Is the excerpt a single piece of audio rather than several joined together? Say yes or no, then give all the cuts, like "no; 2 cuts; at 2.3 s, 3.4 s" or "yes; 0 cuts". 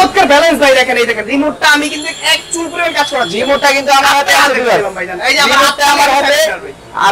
yes; 0 cuts